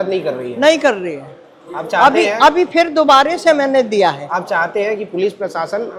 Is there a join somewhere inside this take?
no; 0 cuts

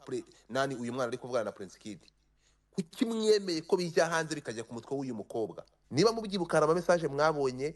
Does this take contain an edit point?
yes; 1 cut; at 5.7 s

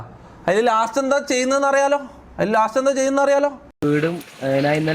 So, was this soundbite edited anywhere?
yes; 1 cut; at 3.7 s

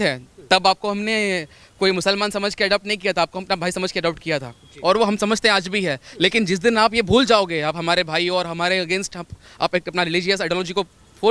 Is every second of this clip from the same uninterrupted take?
yes; 0 cuts

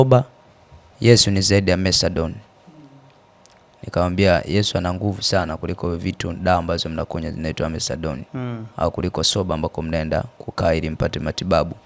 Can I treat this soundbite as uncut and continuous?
yes; 0 cuts

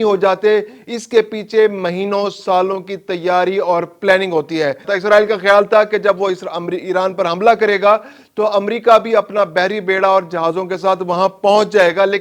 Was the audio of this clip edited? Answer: yes; 1 cut; at 4.9 s

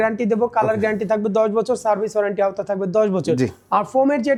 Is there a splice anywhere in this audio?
no; 0 cuts

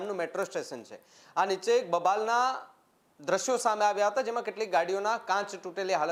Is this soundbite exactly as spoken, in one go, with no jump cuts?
yes; 0 cuts

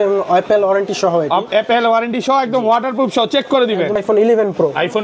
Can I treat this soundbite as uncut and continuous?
no; 1 cut; at 4.0 s

